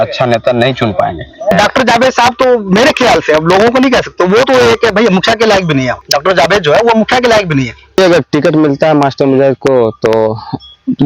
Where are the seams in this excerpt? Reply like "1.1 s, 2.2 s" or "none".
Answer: 1.5 s, 6.0 s, 8.0 s